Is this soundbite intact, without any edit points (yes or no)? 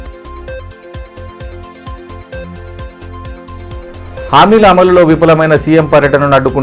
yes